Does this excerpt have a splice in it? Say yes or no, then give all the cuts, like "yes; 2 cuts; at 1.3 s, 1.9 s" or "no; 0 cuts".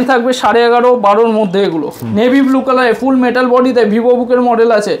yes; 1 cut; at 2.0 s